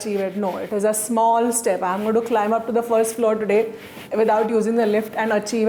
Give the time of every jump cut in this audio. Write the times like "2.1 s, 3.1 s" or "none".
none